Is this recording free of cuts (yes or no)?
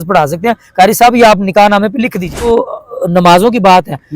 no